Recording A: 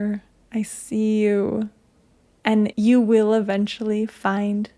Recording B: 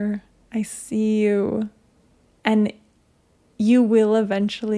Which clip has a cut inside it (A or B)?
A